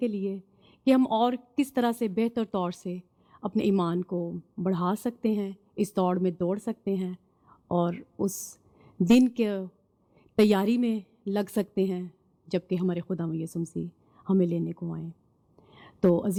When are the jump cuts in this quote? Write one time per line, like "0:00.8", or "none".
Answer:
none

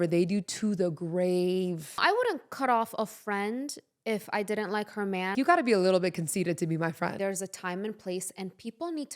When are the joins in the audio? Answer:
0:02.0
0:05.3
0:07.1

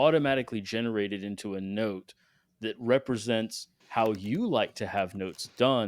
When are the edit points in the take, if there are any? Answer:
0:03.7

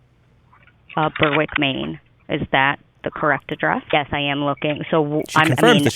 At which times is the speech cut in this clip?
0:03.8

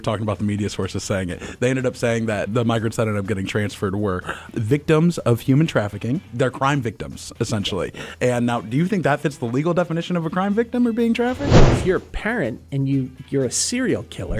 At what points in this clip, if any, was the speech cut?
0:02.5
0:04.5
0:06.3
0:11.4

